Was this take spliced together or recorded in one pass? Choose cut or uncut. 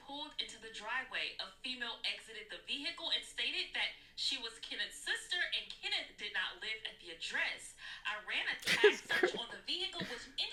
uncut